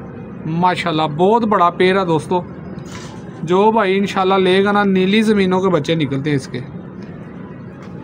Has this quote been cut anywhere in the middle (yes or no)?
no